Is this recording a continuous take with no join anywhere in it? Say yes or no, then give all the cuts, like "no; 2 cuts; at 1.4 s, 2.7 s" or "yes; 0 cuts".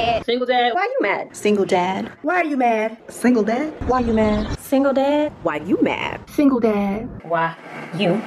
yes; 0 cuts